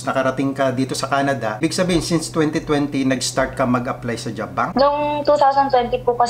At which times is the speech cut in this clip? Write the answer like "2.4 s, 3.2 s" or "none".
1.6 s, 4.7 s

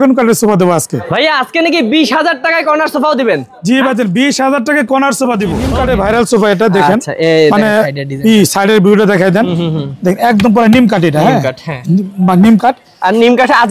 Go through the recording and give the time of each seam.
1.0 s, 5.7 s

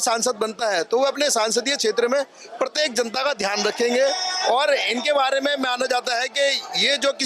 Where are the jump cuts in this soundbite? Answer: none

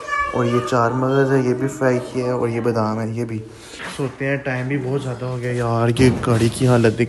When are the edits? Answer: 3.8 s

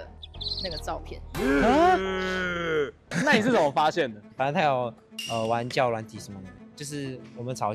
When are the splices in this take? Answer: 3.0 s, 6.6 s

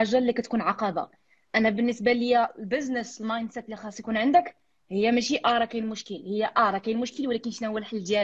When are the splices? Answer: none

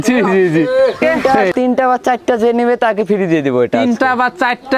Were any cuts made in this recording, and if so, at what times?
1.0 s

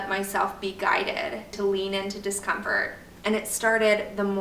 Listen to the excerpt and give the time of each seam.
1.6 s, 3.0 s

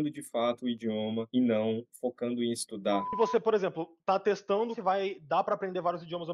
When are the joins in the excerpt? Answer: 3.1 s, 4.8 s

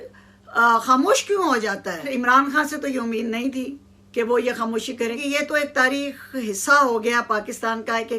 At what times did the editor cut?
2.1 s, 5.2 s

